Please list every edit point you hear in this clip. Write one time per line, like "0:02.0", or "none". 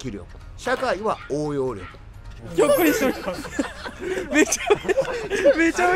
0:02.4